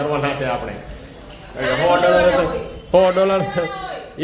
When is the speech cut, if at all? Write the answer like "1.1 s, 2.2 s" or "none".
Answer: 2.7 s